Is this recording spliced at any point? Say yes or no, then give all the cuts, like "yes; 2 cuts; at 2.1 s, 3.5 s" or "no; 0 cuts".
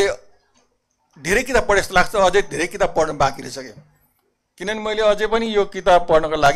no; 0 cuts